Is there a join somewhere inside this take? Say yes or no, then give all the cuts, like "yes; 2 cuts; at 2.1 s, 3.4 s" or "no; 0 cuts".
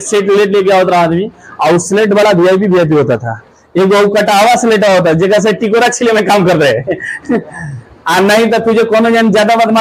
no; 0 cuts